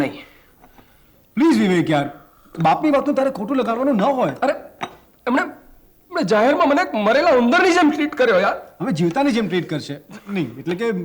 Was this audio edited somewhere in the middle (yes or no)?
no